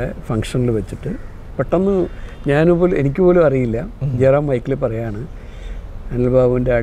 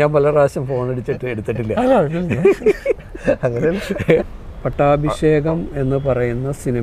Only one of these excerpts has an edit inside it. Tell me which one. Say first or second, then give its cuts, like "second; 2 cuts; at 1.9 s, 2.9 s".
second; 1 cut; at 4.2 s